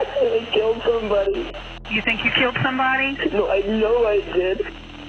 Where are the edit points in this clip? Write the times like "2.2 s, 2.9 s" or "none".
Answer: none